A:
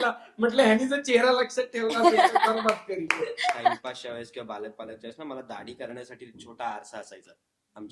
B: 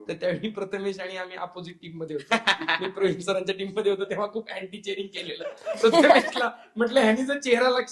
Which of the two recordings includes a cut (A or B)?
A